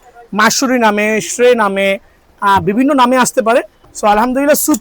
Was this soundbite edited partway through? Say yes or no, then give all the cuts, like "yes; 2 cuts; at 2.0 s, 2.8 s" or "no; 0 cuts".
yes; 1 cut; at 3.8 s